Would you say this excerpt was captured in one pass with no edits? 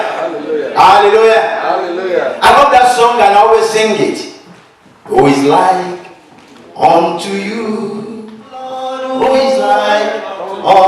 no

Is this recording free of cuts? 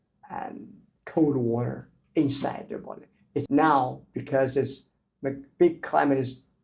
no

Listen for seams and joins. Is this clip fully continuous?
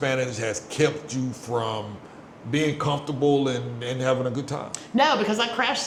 yes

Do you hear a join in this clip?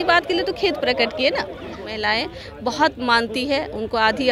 yes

